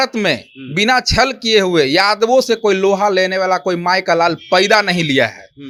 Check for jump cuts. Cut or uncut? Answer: uncut